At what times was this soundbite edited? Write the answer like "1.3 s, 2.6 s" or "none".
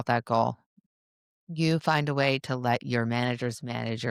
none